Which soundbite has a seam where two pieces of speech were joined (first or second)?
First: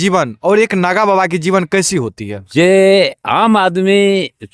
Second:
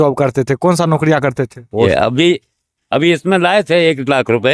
second